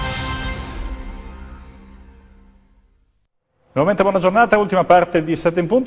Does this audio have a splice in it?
yes; 1 cut; at 2.9 s

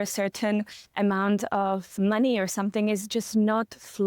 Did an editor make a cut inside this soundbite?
yes; 1 cut; at 1.9 s

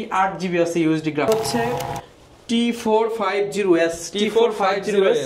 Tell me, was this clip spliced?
yes; 1 cut; at 1.3 s

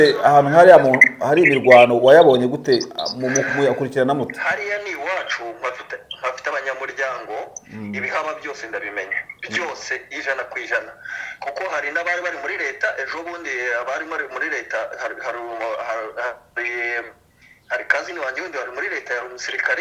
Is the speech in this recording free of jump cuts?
yes; 0 cuts

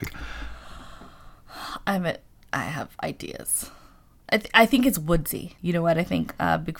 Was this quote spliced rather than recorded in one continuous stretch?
yes; 1 cut; at 5.5 s

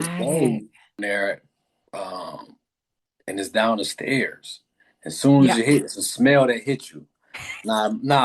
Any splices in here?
yes; 1 cut; at 1.0 s

